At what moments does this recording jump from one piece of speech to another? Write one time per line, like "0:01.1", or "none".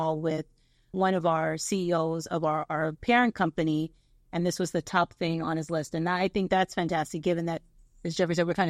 0:00.9